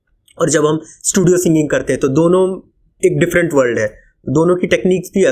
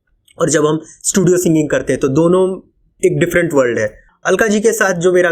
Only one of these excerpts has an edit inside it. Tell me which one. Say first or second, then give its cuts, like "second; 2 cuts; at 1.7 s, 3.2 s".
second; 1 cut; at 4.1 s